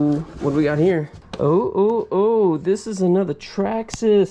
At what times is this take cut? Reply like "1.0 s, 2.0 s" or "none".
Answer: 1.2 s

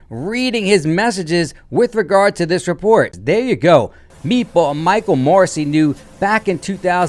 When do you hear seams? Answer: 3.2 s

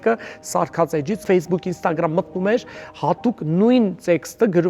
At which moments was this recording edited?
1.2 s

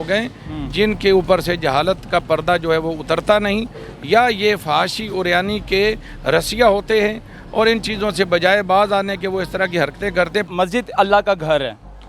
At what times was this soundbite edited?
10.4 s

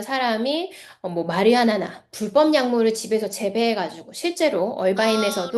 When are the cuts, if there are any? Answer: none

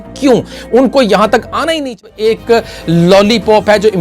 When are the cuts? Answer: 2.0 s

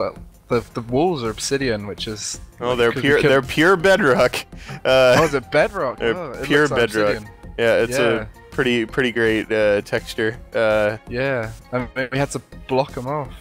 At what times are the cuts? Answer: 5.7 s

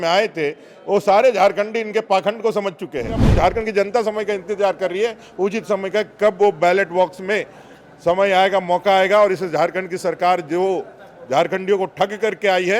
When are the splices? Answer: 3.3 s

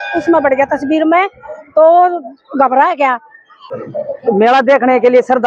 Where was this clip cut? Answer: 3.6 s

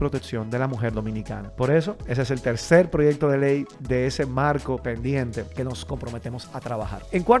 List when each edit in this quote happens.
none

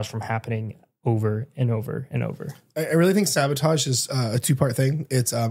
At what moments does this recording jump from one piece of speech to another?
none

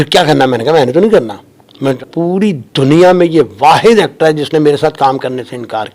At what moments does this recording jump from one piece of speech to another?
2.0 s

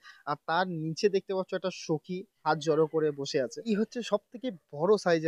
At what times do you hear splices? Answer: 2.4 s, 3.6 s

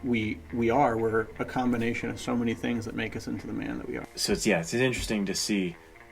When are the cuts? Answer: 4.1 s

